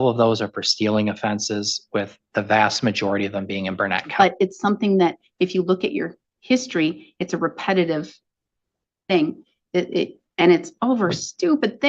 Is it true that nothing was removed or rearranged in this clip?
no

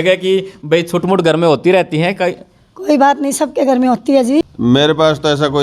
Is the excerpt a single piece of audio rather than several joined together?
no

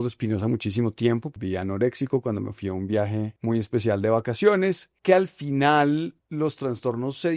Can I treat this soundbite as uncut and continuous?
no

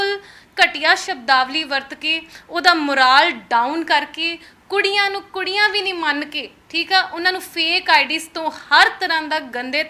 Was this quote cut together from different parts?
no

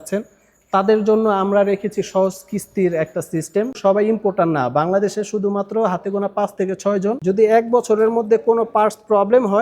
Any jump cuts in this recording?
yes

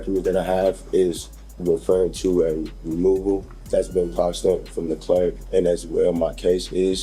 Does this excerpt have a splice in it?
yes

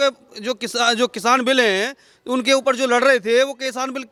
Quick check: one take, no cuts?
yes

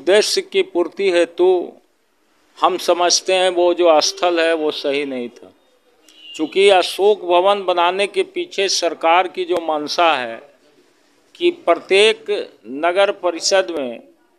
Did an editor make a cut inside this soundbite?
no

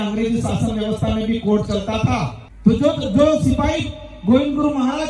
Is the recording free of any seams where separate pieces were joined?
yes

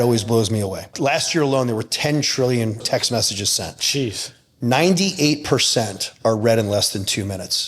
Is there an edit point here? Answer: yes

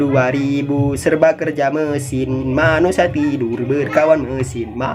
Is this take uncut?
no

